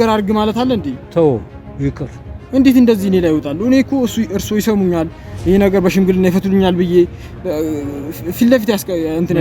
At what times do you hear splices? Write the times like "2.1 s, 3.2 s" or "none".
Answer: none